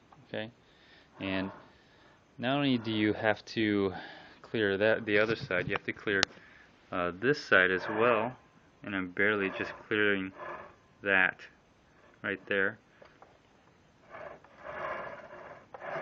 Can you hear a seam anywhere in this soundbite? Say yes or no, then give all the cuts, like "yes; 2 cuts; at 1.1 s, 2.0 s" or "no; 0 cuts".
no; 0 cuts